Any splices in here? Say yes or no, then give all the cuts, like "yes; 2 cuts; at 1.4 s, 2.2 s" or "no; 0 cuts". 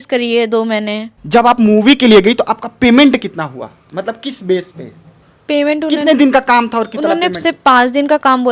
yes; 1 cut; at 1.1 s